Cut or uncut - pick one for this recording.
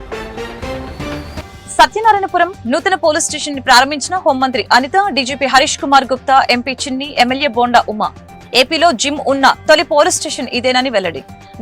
cut